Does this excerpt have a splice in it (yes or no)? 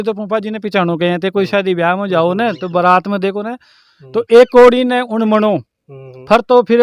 no